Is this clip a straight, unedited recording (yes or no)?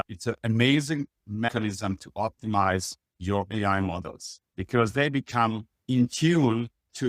no